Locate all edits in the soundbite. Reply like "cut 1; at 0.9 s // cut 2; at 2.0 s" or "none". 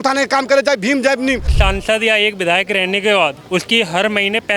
cut 1; at 1.5 s // cut 2; at 3.4 s

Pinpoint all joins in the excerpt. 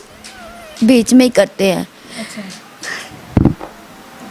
none

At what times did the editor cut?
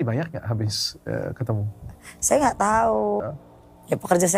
cut 1; at 3.3 s

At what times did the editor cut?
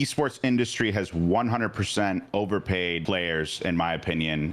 cut 1; at 3.0 s

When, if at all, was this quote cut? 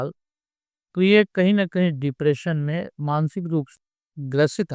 cut 1; at 3.7 s

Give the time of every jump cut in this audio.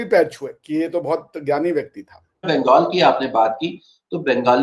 cut 1; at 2.5 s

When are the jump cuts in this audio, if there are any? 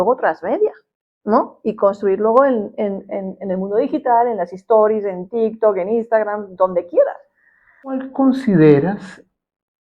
cut 1; at 8.0 s

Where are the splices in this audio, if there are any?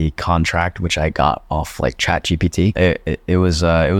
cut 1; at 2.7 s

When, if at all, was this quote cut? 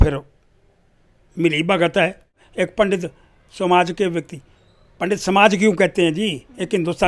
cut 1; at 2.4 s

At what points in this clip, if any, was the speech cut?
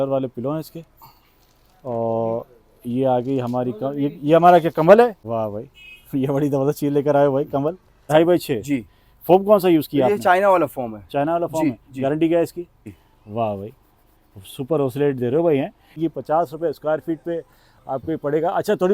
cut 1; at 5.2 s // cut 2; at 8.0 s // cut 3; at 12.7 s // cut 4; at 16.0 s

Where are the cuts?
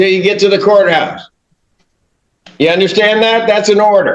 none

